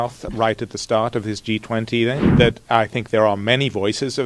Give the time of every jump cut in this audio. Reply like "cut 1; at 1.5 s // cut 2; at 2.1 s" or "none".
cut 1; at 2.3 s